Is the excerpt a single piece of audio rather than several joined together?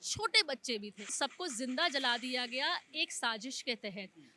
no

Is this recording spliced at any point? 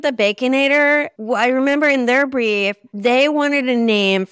yes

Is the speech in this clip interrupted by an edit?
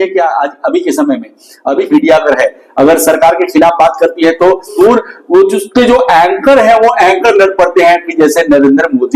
yes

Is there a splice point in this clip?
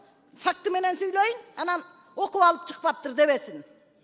no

